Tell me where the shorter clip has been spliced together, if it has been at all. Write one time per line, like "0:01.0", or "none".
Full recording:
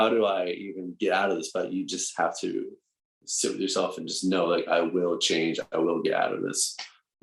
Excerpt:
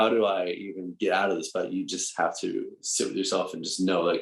0:02.8